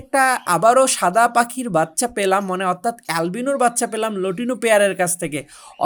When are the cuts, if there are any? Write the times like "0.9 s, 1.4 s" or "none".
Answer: none